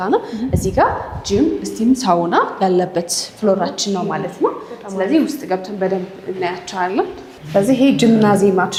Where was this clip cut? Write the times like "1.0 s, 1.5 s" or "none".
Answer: none